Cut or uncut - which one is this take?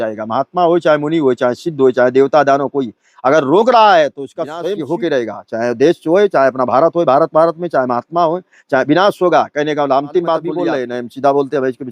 cut